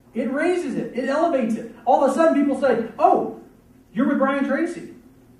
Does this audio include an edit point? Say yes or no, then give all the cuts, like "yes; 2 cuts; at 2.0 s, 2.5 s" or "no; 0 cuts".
no; 0 cuts